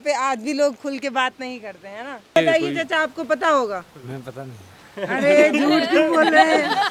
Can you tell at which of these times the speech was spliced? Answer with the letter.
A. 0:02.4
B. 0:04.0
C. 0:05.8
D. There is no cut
A